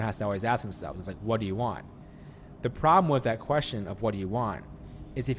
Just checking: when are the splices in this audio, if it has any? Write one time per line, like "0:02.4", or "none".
none